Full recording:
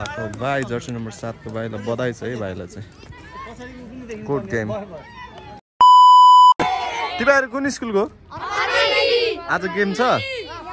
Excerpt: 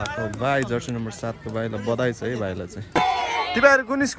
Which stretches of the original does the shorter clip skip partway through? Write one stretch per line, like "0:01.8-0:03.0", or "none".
0:02.9-0:06.6